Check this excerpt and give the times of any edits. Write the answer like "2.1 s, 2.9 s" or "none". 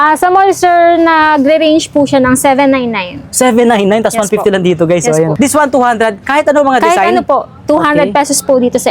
5.3 s